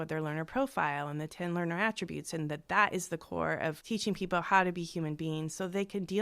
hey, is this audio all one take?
no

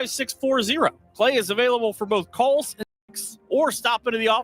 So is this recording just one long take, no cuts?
no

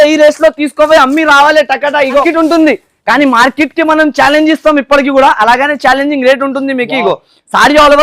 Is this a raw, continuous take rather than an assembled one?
no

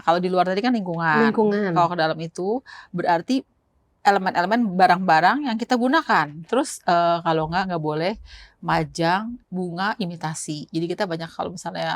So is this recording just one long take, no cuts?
no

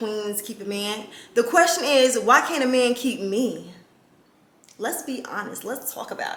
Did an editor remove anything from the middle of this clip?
no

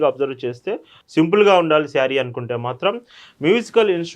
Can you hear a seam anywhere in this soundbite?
yes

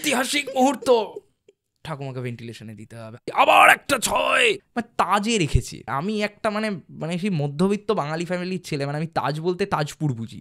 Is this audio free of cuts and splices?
no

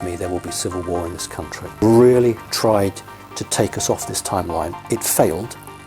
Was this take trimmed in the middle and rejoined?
yes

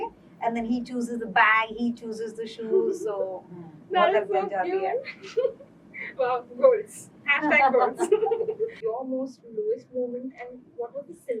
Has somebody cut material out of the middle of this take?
yes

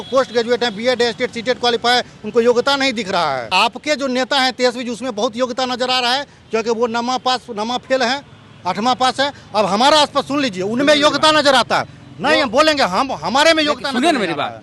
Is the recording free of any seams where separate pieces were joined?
no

